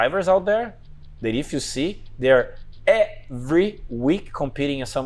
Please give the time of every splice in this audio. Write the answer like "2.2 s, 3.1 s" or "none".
none

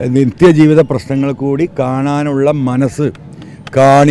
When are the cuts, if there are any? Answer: none

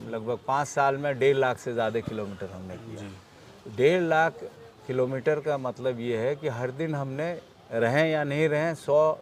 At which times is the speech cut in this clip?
none

